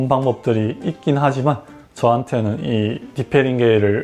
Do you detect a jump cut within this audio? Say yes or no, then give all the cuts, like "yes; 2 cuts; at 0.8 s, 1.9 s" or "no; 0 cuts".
no; 0 cuts